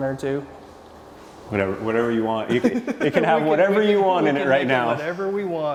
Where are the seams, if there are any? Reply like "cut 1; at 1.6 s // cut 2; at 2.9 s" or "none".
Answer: none